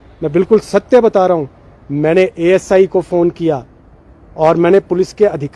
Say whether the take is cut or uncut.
uncut